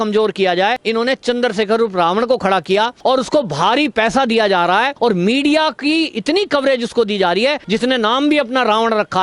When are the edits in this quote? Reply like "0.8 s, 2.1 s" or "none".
0.8 s, 2.9 s, 4.9 s, 7.6 s